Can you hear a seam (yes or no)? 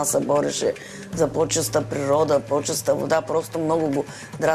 no